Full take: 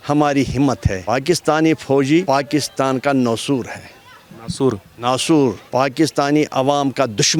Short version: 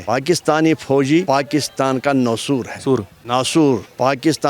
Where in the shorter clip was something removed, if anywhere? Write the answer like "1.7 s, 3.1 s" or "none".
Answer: 2.7 s

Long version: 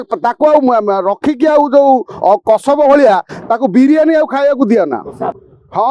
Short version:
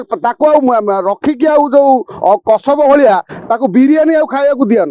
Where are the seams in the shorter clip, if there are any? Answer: none

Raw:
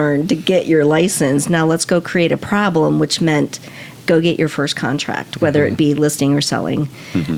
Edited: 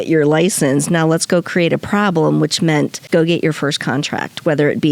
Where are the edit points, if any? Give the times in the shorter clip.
3.0 s

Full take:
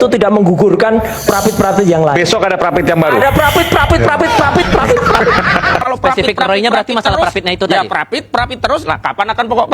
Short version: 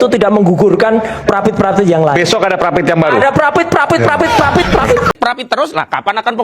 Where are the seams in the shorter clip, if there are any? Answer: 5.1 s

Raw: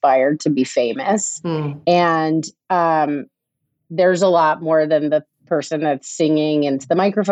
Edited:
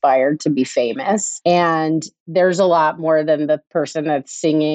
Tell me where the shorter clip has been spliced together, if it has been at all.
1.3 s, 2.1 s, 3.7 s

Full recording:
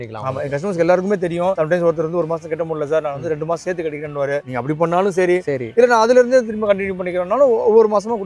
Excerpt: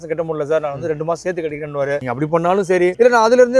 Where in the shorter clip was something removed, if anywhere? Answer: 2.6 s

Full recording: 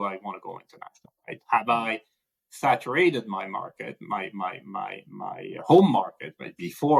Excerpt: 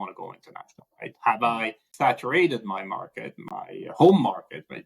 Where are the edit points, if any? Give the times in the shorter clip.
1.8 s, 3.3 s

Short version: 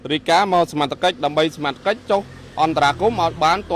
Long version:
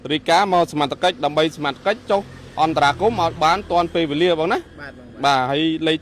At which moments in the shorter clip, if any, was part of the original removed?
none

